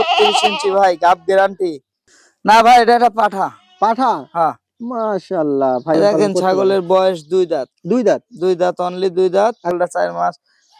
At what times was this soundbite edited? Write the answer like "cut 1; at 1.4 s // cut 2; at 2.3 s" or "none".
cut 1; at 2.2 s // cut 2; at 6.0 s // cut 3; at 9.8 s